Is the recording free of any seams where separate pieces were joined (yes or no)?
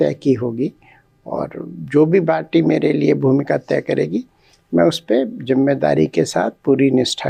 yes